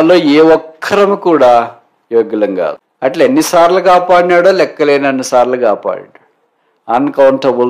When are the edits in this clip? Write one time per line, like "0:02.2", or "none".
0:02.8